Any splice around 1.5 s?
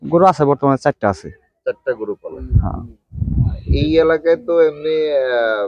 no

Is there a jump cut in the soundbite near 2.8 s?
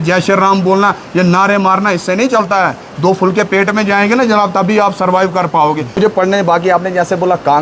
no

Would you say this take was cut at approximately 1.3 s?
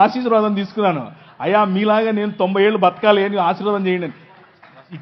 no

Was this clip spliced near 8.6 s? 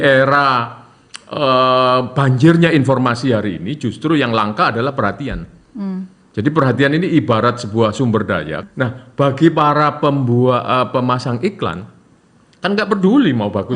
yes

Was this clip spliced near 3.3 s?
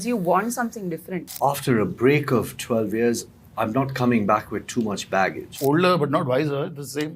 no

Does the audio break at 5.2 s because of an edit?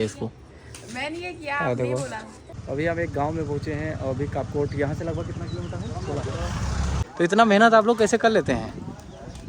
no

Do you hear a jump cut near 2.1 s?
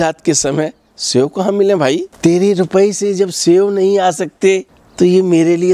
yes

